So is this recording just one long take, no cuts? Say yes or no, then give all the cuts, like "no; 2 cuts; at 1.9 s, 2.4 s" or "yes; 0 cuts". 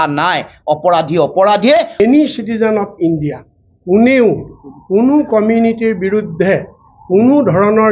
no; 1 cut; at 2.0 s